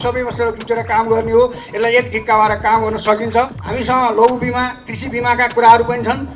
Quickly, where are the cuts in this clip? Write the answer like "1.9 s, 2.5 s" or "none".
3.6 s